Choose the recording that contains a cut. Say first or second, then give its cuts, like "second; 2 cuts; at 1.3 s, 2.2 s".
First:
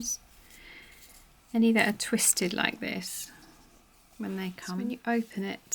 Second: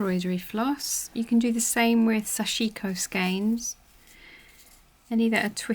first; 1 cut; at 4.8 s